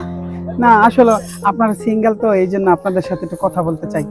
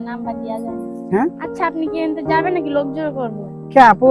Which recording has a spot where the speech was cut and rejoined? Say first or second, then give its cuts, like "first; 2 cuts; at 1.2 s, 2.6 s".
second; 1 cut; at 1.5 s